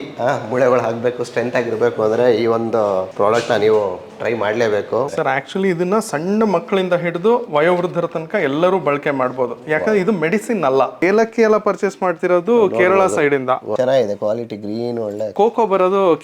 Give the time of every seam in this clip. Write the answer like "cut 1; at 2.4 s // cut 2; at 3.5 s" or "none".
cut 1; at 5.1 s // cut 2; at 11.0 s